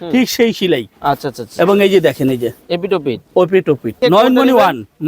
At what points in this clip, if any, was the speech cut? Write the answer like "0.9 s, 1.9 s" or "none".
4.0 s